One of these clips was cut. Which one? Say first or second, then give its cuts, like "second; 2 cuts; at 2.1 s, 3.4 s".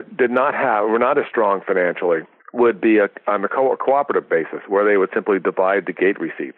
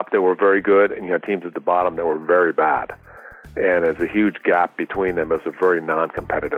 first; 1 cut; at 2.4 s